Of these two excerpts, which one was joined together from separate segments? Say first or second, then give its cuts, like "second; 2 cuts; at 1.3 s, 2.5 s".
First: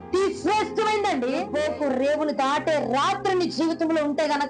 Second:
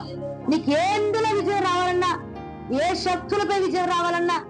first; 1 cut; at 1.5 s